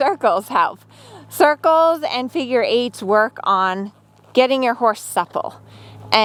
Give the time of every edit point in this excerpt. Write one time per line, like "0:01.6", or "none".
none